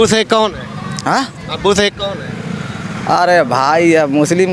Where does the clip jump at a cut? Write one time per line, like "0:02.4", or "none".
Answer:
none

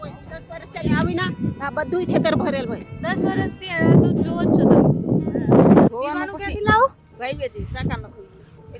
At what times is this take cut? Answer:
0:05.9

